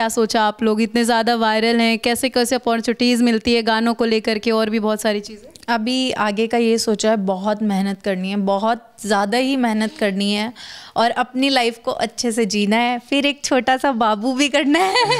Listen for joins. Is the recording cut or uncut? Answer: uncut